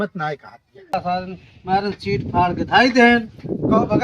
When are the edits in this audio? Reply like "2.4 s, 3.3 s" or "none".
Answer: 0.9 s